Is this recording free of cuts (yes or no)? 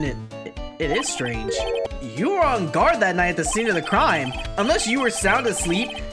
no